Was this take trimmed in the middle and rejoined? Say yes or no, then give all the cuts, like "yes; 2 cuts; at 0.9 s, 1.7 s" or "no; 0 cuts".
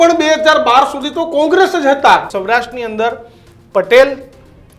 yes; 1 cut; at 2.3 s